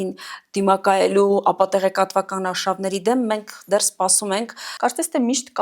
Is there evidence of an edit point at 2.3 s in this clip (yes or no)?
no